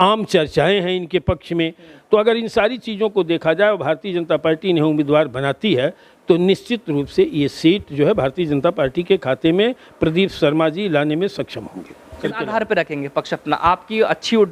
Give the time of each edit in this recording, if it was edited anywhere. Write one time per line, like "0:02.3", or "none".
0:12.2